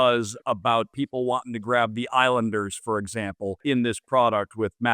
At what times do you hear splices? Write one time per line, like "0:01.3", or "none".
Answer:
0:00.9
0:03.6